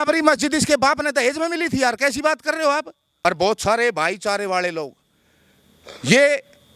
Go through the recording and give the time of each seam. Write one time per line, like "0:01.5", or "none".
0:03.1